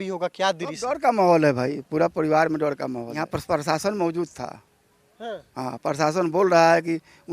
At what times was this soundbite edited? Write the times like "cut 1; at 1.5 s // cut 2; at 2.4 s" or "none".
cut 1; at 3.3 s